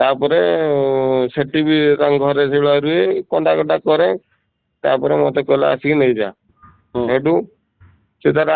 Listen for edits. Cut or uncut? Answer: uncut